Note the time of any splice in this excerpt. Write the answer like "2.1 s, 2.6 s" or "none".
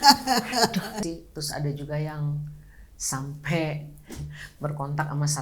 0.9 s